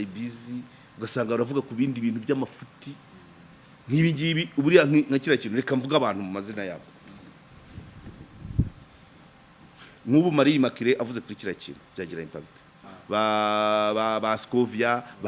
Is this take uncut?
no; 1 cut; at 12.9 s

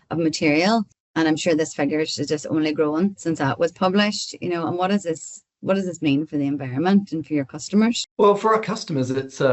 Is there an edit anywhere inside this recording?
yes; 2 cuts; at 1.0 s, 8.1 s

